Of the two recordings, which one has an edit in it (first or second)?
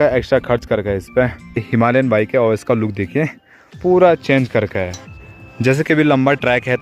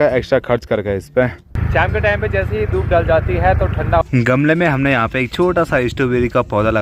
second